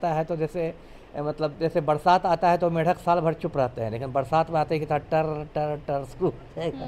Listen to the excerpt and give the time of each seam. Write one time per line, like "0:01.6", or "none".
none